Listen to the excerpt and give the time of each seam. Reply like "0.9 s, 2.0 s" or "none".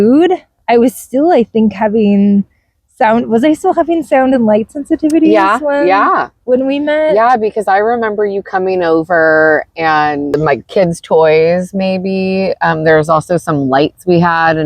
10.3 s